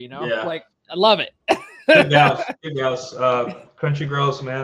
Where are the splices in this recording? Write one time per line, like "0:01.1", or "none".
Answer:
none

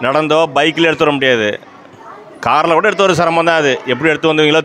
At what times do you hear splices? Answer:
none

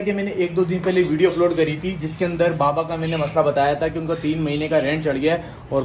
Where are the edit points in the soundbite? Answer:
none

